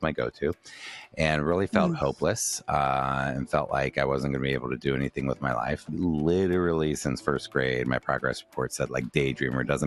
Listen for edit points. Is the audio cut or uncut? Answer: uncut